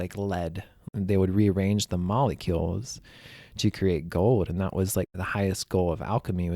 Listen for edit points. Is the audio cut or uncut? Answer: cut